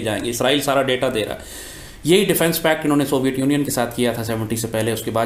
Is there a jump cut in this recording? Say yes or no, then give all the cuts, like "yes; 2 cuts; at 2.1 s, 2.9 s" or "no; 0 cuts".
no; 0 cuts